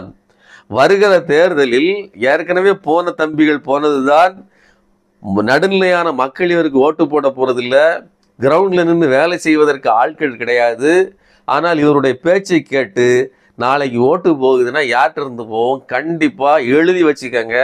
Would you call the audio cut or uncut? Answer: uncut